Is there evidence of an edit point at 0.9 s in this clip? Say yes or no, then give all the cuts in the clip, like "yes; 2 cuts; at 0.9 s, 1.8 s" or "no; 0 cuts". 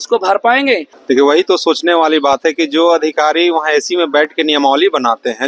yes; 1 cut; at 0.9 s